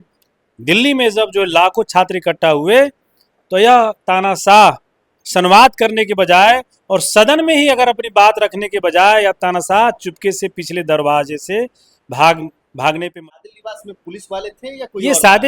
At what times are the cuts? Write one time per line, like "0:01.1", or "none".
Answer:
0:13.1